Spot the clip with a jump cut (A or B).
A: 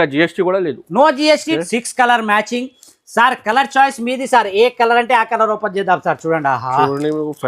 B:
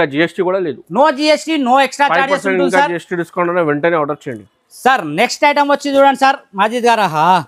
A